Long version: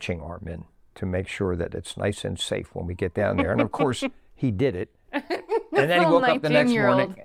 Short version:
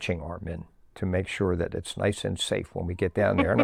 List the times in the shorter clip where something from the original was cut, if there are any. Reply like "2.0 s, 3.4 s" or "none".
none